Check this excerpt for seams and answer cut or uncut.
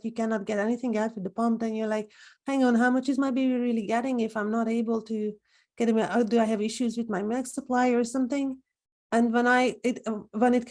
uncut